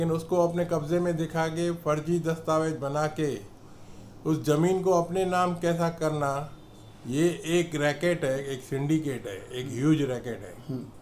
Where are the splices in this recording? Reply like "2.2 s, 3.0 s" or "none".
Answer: none